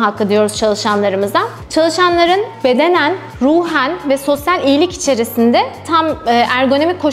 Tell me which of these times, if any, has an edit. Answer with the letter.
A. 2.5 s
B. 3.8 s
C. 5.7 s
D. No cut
D